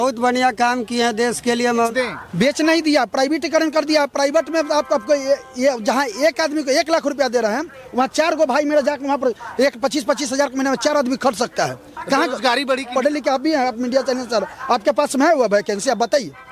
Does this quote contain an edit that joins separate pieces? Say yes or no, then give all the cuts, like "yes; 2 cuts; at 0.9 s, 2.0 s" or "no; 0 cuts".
yes; 2 cuts; at 1.9 s, 12.9 s